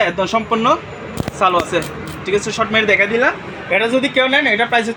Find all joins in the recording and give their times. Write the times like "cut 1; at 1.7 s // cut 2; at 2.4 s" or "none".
none